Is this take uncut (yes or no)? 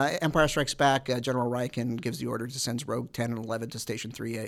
yes